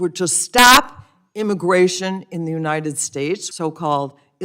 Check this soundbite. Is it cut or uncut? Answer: cut